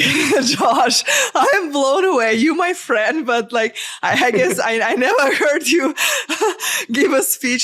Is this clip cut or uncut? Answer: uncut